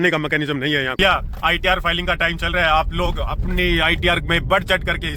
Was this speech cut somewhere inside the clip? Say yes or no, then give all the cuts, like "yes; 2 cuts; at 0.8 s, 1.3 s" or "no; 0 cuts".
yes; 1 cut; at 0.9 s